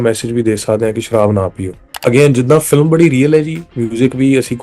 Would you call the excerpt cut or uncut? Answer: cut